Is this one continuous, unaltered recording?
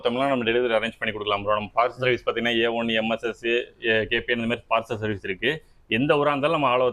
yes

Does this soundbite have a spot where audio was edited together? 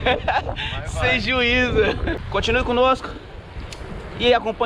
yes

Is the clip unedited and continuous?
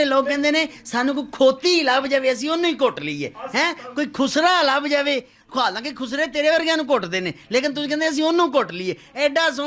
yes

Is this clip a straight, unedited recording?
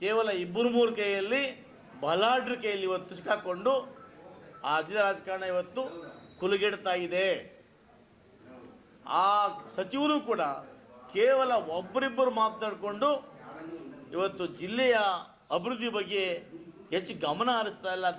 yes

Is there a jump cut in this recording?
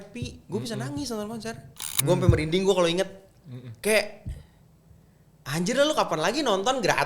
yes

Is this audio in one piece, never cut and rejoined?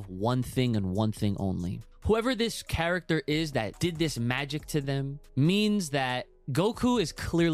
no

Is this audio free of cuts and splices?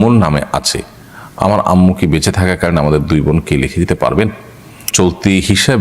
no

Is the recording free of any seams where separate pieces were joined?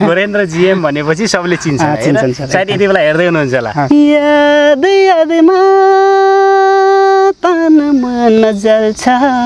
no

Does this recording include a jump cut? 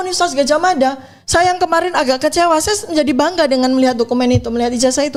no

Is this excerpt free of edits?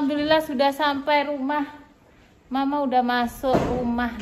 yes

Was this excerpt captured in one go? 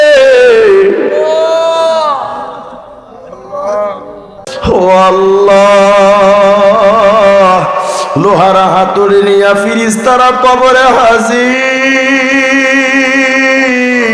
no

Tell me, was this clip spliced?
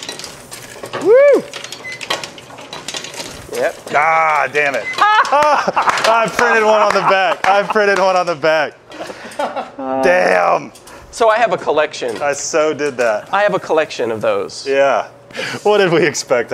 yes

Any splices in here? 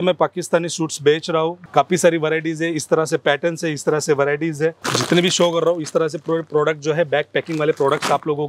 yes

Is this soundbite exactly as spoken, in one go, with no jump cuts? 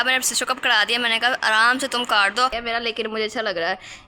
no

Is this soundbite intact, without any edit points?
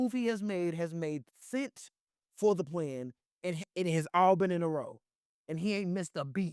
yes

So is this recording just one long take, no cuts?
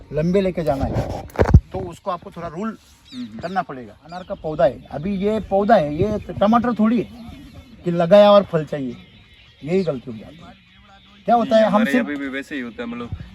no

